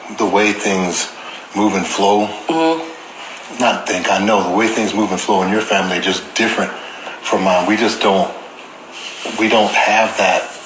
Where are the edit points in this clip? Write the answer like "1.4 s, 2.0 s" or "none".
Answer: none